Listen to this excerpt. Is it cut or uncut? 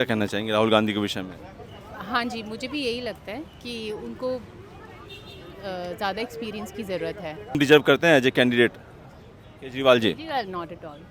cut